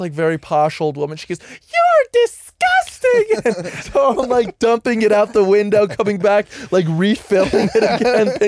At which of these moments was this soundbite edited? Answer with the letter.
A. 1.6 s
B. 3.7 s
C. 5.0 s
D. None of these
B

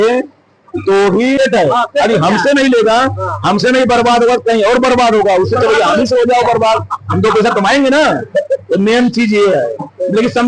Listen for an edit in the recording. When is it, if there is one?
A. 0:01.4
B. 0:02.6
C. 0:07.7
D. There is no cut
A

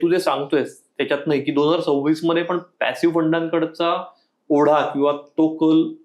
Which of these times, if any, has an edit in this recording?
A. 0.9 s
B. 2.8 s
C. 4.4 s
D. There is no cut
D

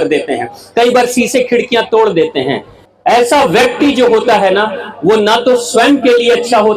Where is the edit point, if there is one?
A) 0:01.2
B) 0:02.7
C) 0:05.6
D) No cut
B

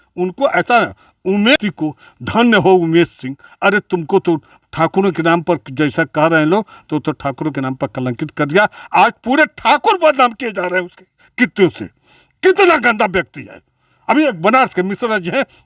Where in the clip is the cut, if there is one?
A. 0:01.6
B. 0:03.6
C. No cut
A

